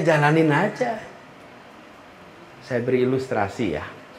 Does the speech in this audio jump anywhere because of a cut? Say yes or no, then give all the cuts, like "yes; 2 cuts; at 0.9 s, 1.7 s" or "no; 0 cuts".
no; 0 cuts